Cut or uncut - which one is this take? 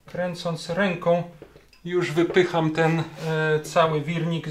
uncut